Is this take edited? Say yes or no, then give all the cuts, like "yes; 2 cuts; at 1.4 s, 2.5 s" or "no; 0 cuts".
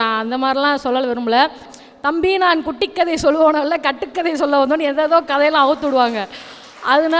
yes; 1 cut; at 1.8 s